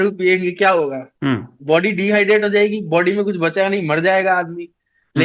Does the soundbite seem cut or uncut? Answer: cut